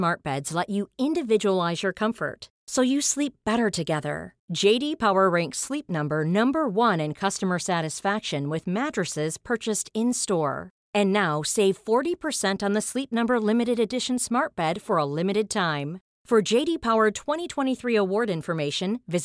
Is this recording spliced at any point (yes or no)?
no